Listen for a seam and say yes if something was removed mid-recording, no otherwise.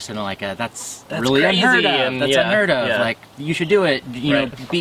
no